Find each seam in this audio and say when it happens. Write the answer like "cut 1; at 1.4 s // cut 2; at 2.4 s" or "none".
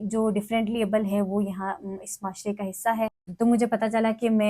cut 1; at 3.2 s

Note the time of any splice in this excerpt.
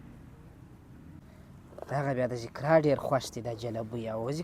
cut 1; at 1.2 s

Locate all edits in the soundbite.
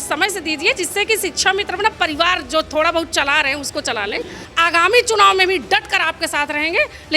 cut 1; at 4.4 s

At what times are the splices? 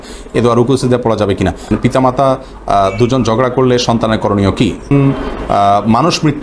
cut 1; at 1.7 s // cut 2; at 4.9 s

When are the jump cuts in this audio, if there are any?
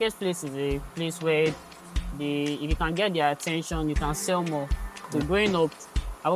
cut 1; at 5.1 s

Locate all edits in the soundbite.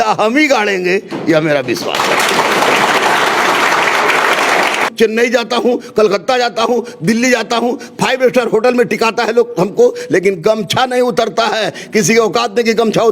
cut 1; at 4.8 s

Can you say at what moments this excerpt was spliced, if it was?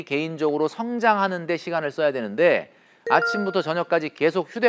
none

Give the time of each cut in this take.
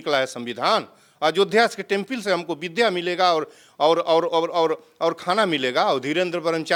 none

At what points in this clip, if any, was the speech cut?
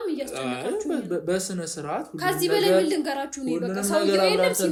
none

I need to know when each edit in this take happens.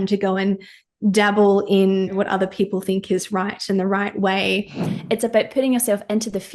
cut 1; at 2.1 s // cut 2; at 4.9 s

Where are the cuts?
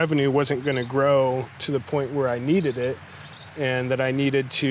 none

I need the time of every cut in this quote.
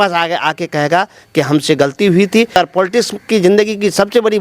cut 1; at 2.5 s

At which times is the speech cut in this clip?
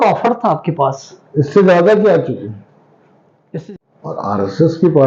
cut 1; at 3.5 s

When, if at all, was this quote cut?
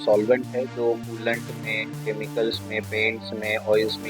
none

